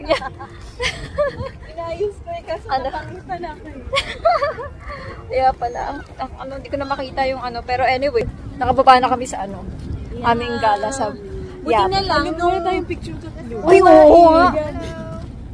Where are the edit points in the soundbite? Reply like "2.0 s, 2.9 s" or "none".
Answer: 8.3 s